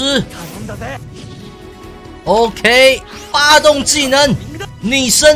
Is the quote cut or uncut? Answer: cut